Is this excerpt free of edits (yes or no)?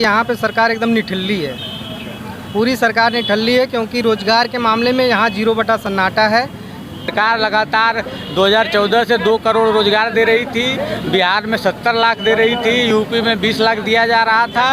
no